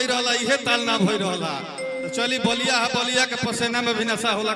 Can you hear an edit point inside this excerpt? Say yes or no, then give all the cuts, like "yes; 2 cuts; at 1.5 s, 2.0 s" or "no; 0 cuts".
no; 0 cuts